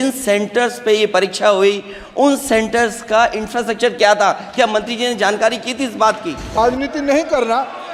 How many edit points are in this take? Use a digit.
1